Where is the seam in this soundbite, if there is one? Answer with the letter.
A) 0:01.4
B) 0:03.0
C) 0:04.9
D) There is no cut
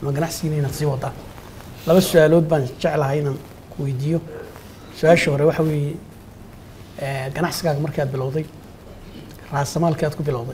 D